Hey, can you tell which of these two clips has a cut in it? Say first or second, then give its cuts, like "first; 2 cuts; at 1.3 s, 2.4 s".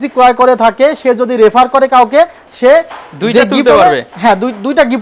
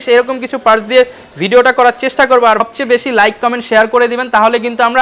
second; 1 cut; at 2.6 s